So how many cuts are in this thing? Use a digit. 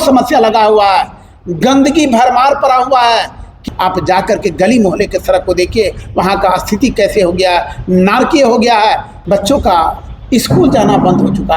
2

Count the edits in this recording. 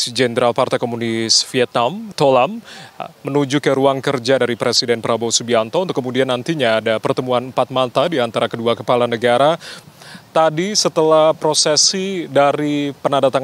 2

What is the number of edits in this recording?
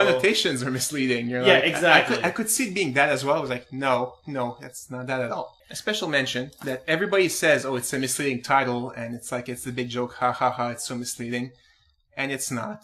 1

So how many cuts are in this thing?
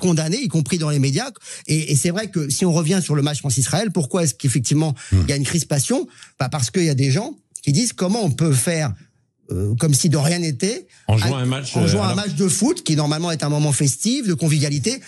0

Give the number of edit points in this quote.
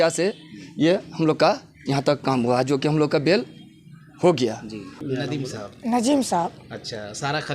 1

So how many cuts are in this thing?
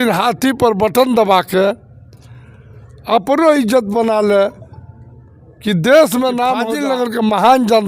1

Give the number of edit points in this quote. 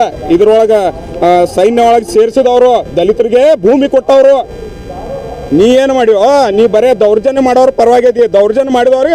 0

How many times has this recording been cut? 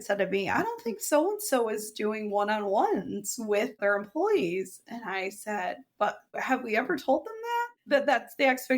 2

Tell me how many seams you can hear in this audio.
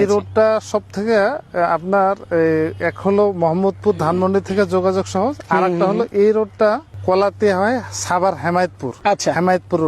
2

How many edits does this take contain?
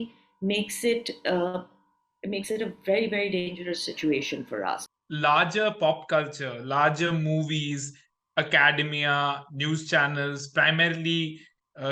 1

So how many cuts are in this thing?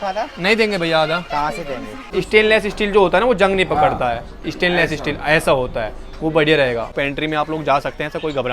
2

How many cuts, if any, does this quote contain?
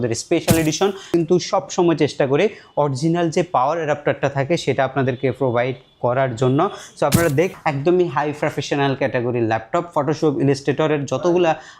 2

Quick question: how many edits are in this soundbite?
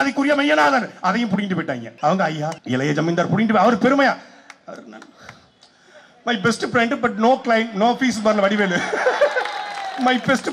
2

